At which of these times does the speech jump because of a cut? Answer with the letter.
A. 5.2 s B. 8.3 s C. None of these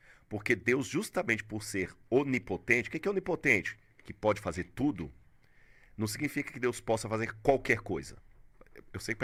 C